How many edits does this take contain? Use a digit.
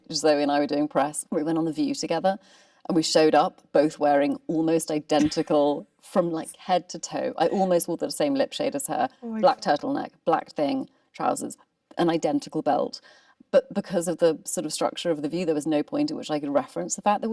1